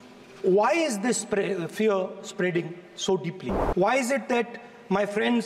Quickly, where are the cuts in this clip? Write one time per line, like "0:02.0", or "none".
0:03.5